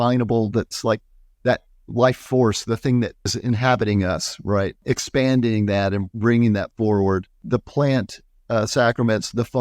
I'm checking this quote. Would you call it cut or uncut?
cut